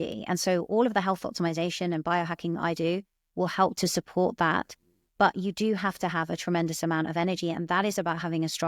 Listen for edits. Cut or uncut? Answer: uncut